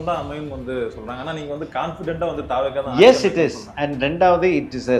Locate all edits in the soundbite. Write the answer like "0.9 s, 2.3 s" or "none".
none